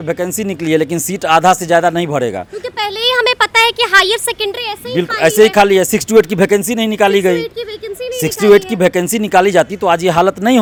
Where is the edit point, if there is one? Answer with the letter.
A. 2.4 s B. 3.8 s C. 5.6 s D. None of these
D